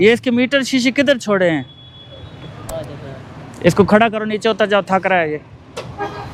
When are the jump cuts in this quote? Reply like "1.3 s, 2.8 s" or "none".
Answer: none